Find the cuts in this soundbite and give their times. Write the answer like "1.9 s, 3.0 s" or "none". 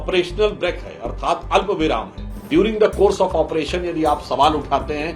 2.5 s